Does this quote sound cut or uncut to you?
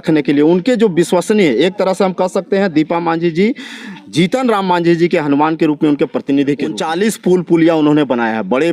cut